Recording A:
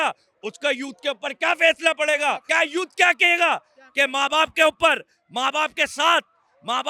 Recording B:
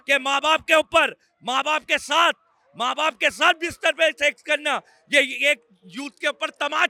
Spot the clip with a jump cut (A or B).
A